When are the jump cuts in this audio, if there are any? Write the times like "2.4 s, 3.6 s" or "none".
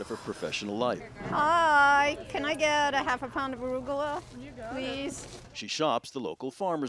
1.2 s